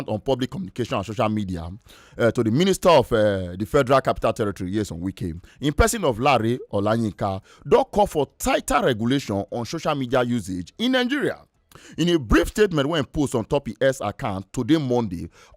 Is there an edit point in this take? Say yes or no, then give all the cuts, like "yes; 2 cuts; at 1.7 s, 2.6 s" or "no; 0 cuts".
no; 0 cuts